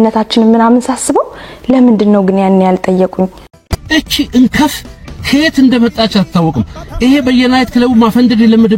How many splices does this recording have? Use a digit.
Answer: 1